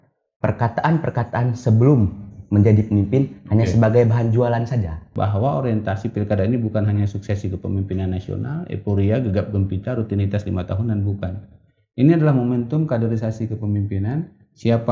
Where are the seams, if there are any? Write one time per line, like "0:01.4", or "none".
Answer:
0:05.1